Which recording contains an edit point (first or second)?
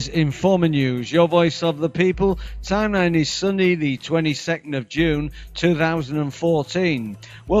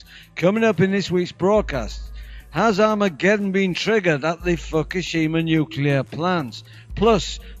second